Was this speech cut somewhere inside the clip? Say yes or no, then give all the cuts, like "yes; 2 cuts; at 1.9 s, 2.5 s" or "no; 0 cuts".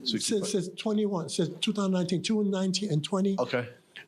no; 0 cuts